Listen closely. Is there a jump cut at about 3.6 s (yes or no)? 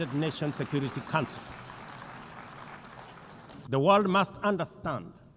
yes